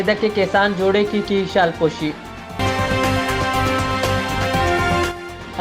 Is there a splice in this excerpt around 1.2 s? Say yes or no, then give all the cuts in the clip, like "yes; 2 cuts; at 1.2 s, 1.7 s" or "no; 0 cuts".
no; 0 cuts